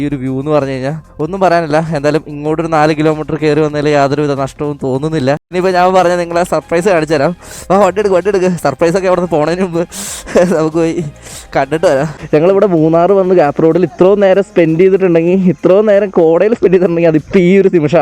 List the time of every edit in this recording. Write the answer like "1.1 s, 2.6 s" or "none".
5.5 s, 12.2 s